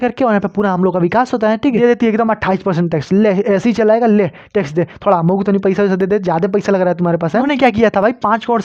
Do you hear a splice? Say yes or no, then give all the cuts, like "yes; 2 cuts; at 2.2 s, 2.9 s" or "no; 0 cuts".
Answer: yes; 2 cuts; at 1.8 s, 7.4 s